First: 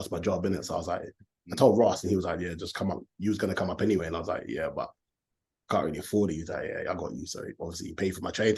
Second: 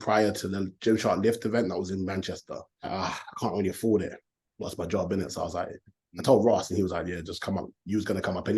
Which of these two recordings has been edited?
second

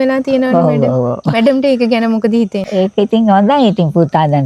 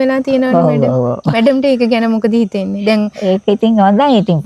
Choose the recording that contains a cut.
first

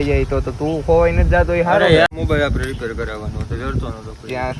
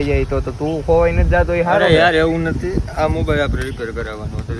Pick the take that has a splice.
first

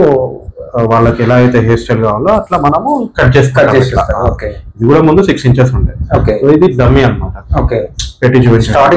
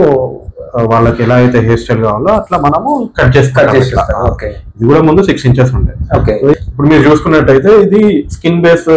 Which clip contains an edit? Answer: second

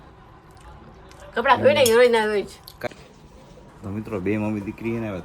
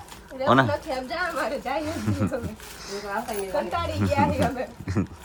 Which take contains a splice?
first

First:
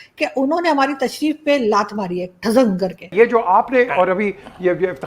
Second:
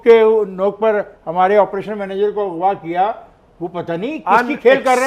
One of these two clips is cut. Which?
first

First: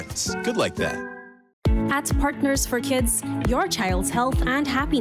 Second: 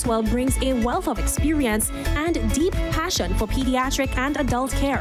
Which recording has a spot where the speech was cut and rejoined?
first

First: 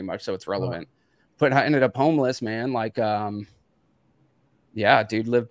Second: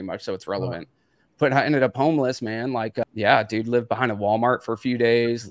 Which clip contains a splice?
second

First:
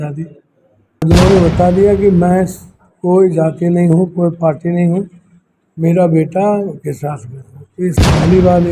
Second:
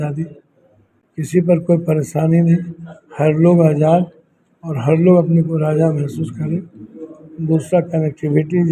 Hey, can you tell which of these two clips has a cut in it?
first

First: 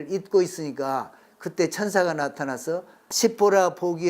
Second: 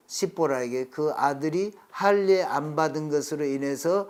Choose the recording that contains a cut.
first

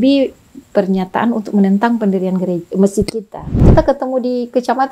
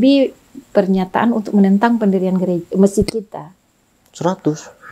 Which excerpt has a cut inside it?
first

